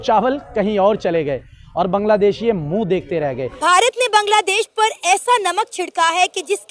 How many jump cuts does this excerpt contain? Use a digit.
1